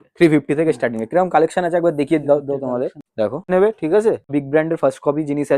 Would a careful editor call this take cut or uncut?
cut